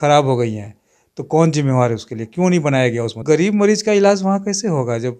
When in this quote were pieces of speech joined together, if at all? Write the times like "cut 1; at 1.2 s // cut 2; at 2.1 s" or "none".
cut 1; at 3.2 s